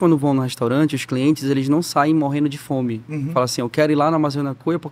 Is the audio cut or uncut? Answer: uncut